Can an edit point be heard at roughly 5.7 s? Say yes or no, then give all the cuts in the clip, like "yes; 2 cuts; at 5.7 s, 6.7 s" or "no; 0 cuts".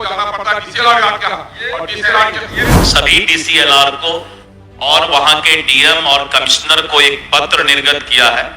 no; 1 cut; at 2.8 s